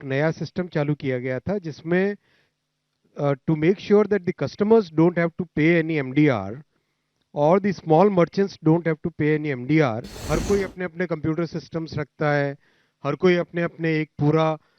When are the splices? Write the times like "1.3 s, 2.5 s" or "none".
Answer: 10.1 s